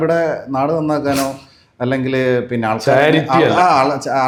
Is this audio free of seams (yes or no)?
yes